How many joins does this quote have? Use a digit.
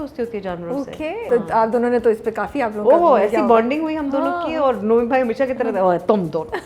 1